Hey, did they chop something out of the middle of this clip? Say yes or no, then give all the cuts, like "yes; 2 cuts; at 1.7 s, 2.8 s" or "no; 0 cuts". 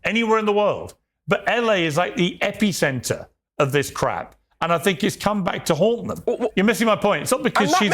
yes; 1 cut; at 6.3 s